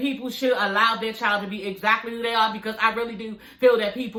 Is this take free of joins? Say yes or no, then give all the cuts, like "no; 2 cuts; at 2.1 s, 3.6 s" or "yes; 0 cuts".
yes; 0 cuts